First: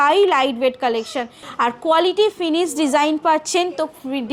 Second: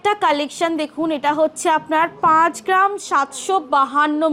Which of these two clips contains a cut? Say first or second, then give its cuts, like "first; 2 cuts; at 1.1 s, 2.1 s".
first; 1 cut; at 1.4 s